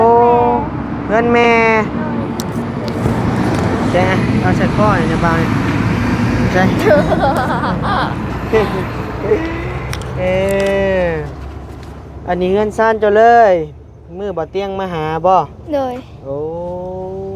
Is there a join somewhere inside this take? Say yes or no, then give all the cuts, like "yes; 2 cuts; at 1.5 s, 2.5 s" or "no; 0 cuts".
no; 0 cuts